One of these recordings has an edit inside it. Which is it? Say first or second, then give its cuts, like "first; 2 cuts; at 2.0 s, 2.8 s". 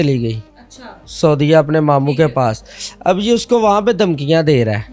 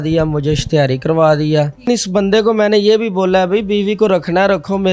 second; 1 cut; at 1.9 s